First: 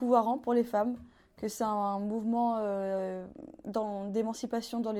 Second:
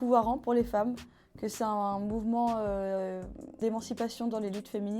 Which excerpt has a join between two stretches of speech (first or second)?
second